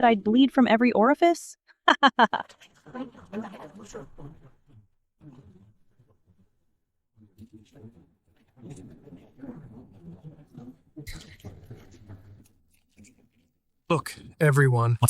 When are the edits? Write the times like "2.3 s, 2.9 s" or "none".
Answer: 11.1 s, 12.4 s